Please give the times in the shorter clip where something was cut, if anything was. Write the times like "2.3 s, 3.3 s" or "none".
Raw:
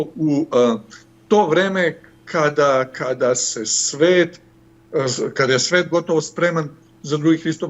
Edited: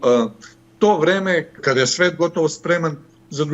1.6 s

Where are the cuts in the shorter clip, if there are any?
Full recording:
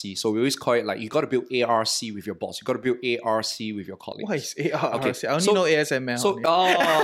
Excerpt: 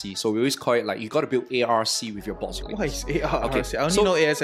2.6 s

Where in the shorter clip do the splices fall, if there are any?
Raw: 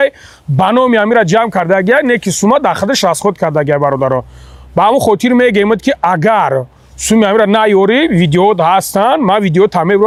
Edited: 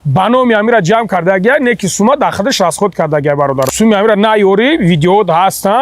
3.7 s

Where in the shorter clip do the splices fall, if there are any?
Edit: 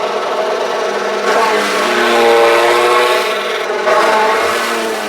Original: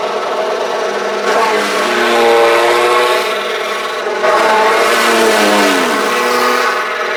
3.6 s

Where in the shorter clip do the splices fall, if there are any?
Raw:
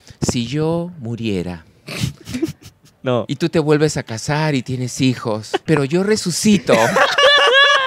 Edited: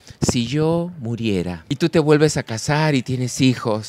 1.7 s

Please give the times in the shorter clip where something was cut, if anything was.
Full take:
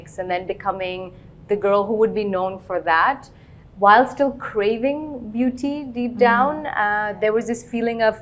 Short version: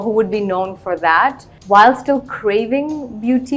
1.5 s

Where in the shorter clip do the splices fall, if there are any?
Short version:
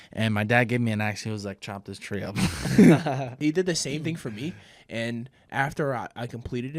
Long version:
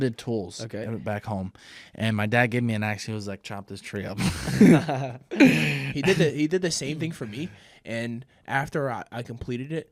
3.4 s

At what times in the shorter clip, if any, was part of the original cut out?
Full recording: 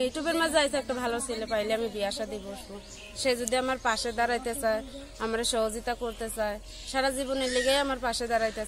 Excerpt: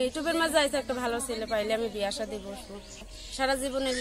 3.1 s

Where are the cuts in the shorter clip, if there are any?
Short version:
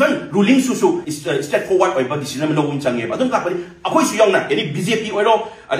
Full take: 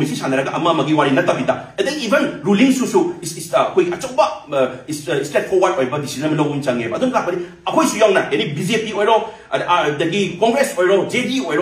1.1 s

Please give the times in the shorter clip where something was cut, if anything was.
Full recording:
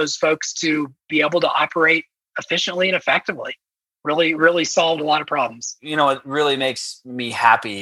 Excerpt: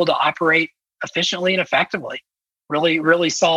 none

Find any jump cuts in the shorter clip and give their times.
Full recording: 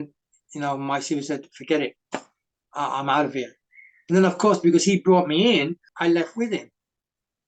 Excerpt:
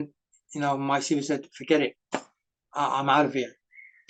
none

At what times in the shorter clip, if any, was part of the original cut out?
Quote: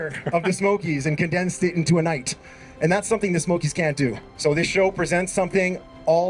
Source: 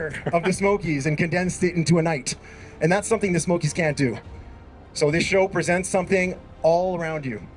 4.3 s

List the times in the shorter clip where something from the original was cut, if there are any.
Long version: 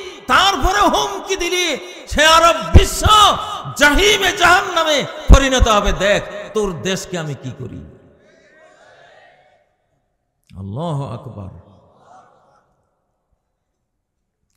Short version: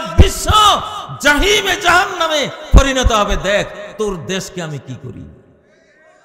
none

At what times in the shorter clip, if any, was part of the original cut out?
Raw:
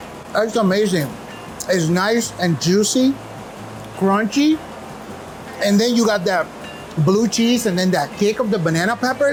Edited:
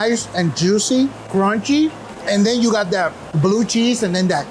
1.2 s, 2.1 s, 3.2 s

